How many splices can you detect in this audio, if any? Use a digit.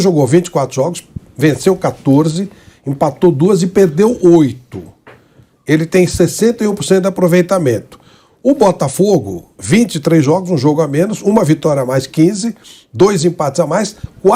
0